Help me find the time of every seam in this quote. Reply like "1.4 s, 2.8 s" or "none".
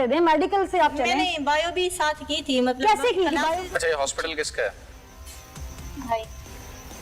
3.6 s